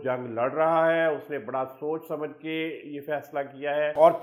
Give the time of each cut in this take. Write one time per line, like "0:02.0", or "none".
none